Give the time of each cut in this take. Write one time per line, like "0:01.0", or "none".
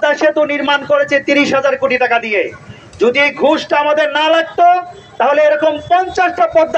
none